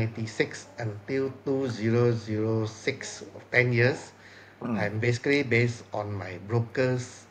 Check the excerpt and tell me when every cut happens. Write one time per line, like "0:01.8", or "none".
none